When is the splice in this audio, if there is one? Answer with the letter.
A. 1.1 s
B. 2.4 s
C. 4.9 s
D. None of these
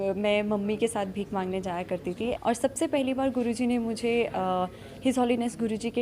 B